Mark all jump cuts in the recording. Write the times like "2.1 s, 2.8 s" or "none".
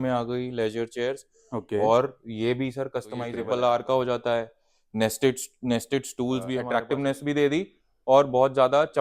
3.4 s, 6.7 s